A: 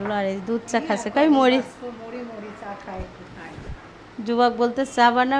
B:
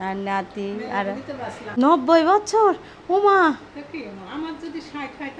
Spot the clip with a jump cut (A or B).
B